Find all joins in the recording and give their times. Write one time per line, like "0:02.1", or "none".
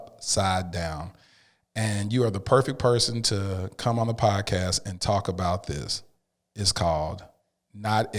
none